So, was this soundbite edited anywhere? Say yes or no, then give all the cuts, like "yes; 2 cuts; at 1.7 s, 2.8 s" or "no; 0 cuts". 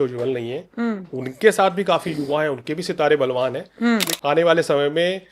yes; 1 cut; at 4.1 s